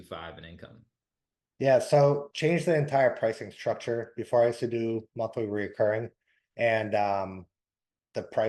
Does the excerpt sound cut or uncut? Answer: uncut